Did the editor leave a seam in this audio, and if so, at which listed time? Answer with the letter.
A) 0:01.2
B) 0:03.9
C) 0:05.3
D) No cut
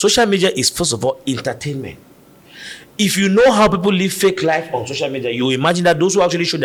D